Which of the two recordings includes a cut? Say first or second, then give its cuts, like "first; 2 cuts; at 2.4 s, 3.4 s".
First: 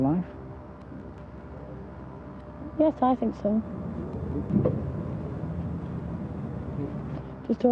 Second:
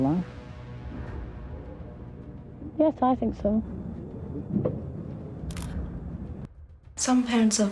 second; 1 cut; at 6.5 s